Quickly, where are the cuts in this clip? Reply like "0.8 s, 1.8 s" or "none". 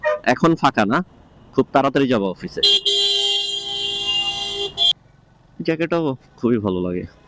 4.6 s